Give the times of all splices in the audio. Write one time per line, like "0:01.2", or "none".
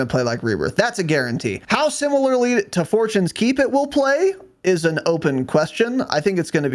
0:01.6